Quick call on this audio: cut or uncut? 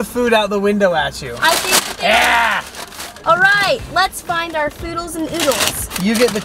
uncut